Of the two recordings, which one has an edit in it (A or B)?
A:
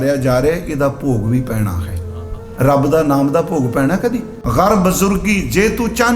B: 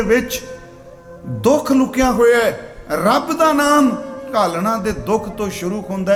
A